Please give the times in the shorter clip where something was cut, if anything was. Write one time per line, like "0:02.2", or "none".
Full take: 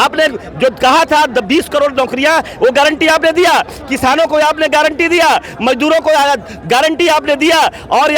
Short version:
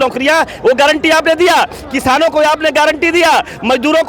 none